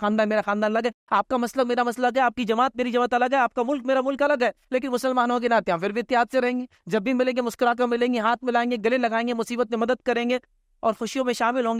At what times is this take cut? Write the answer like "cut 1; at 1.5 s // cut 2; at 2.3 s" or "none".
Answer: none